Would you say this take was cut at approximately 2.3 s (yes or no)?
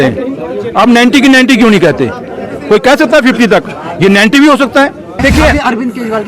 no